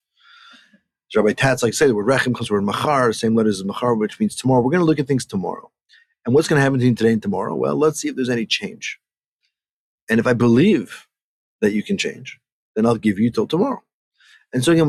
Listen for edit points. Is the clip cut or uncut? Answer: uncut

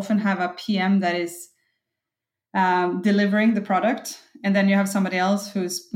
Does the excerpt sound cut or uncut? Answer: uncut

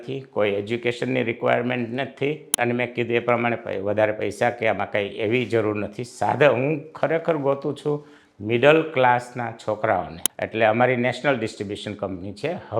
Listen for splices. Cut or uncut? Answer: cut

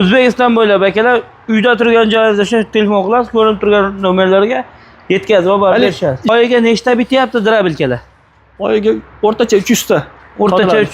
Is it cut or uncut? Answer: cut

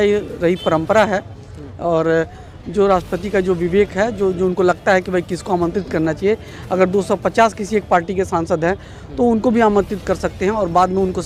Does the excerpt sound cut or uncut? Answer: uncut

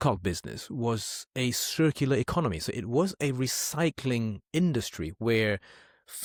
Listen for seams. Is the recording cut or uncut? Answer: uncut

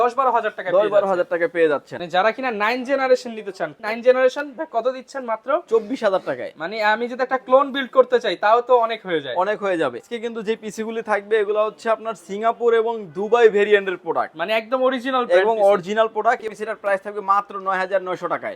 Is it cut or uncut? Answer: cut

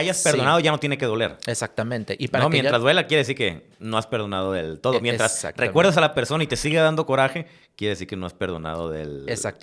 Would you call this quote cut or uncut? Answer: uncut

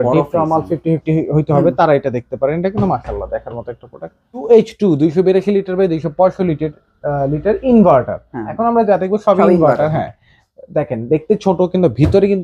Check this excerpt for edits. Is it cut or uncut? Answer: cut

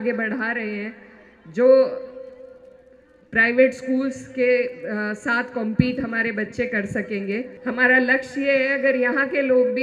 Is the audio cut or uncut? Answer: cut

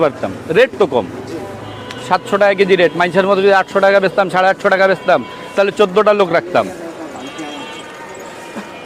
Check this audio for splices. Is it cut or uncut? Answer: uncut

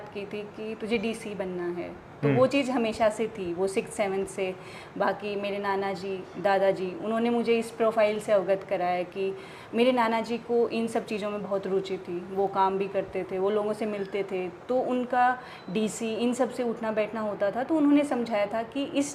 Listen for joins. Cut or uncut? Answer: uncut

